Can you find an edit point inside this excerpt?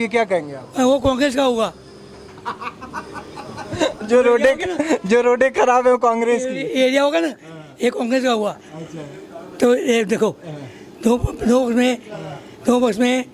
no; 0 cuts

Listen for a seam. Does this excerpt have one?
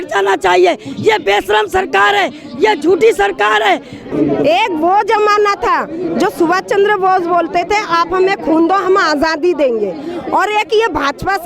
yes; 1 cut; at 4.1 s

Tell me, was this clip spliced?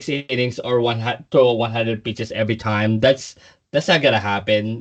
no; 0 cuts

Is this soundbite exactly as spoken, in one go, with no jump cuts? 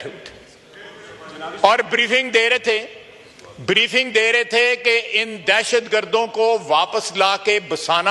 yes; 0 cuts

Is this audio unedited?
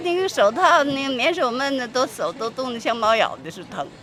yes; 0 cuts

